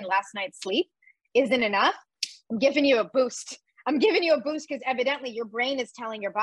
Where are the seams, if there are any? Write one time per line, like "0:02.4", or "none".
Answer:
none